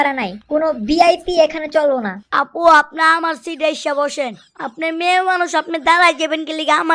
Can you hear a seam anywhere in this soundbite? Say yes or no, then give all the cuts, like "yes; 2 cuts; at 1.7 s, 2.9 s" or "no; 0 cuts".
yes; 1 cut; at 2.2 s